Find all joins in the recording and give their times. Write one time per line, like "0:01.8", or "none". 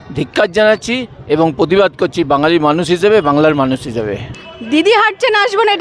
0:04.3

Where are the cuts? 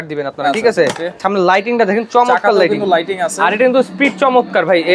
0:01.2

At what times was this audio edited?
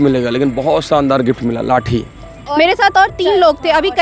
0:02.4

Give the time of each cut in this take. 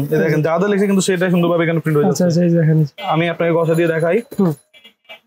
0:03.0

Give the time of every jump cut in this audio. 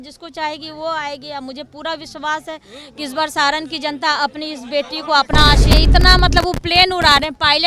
0:05.7

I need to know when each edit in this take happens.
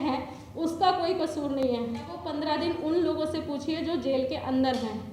0:02.3

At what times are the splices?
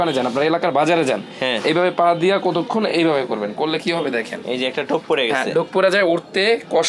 none

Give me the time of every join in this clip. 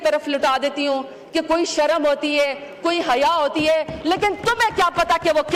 none

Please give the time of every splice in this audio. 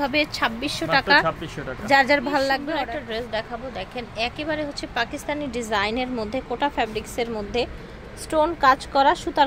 0:02.5

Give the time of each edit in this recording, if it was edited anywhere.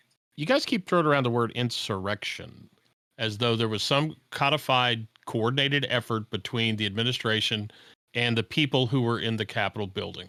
none

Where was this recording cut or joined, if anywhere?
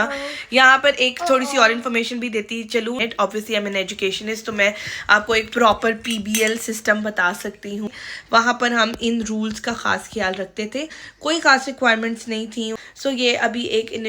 0:03.0
0:07.9
0:11.0
0:12.8

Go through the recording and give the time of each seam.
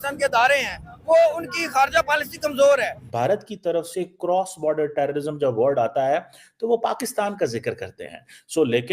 0:03.1

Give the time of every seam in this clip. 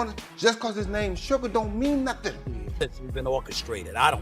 0:02.7

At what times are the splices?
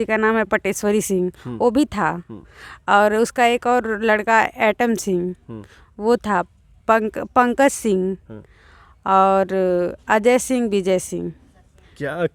none

